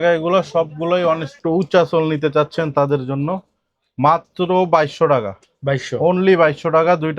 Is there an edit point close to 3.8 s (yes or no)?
no